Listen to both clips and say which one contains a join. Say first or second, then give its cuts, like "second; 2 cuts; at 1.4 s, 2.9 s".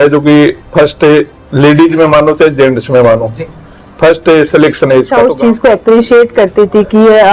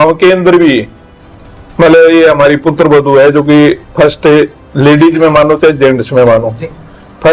first; 1 cut; at 5.2 s